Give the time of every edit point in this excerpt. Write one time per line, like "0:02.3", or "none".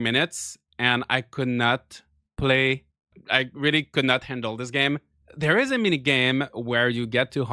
0:03.2
0:05.1